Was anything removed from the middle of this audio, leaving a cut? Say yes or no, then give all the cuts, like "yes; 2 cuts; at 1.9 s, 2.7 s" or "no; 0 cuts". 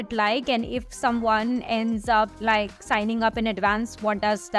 no; 0 cuts